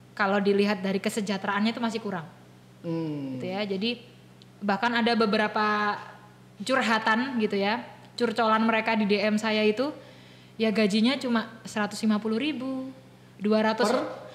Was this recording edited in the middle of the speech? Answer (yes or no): no